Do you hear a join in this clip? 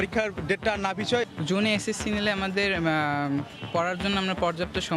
yes; 1 cut; at 1.3 s

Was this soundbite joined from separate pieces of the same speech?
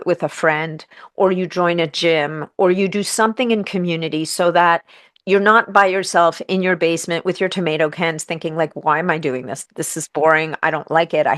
no; 0 cuts

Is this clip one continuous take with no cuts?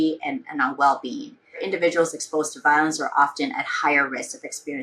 no; 1 cut; at 1.6 s

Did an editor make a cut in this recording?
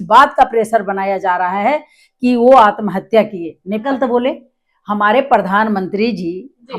yes; 1 cut; at 3.8 s

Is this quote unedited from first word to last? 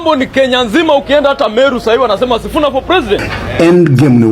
no; 1 cut; at 3.4 s

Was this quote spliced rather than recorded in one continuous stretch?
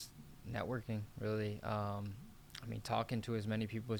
no; 0 cuts

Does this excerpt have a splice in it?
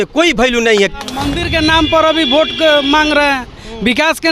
yes; 1 cut; at 1.4 s

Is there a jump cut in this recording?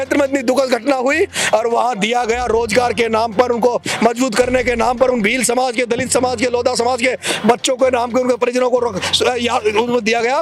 no; 0 cuts

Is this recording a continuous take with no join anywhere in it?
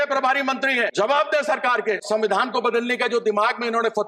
no; 2 cuts; at 0.9 s, 2.0 s

